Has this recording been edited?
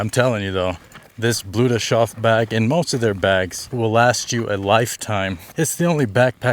yes; 2 cuts; at 3.6 s, 5.4 s

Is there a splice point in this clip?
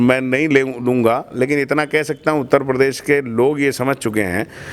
no; 0 cuts

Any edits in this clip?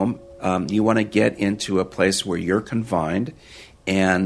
no; 0 cuts

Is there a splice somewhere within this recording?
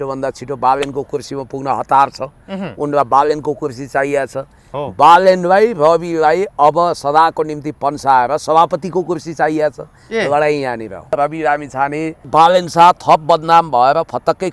yes; 2 cuts; at 11.1 s, 12.2 s

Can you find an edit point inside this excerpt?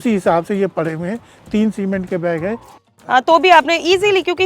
yes; 1 cut; at 2.7 s

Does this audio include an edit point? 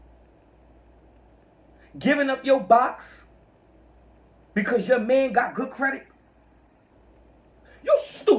no; 0 cuts

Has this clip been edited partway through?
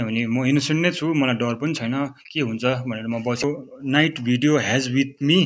yes; 1 cut; at 3.4 s

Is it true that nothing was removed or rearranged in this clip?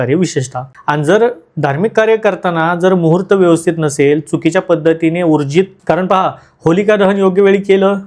no; 1 cut; at 5.8 s

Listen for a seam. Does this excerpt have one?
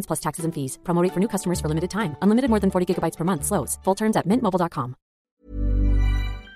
yes; 1 cut; at 5.3 s

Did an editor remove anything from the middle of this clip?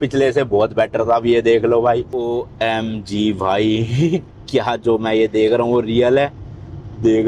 yes; 1 cut; at 2.2 s

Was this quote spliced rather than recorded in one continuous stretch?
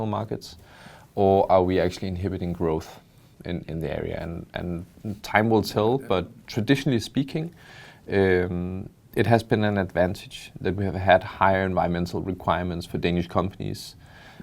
no; 0 cuts

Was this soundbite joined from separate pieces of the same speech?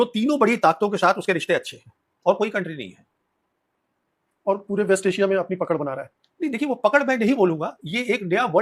no; 0 cuts

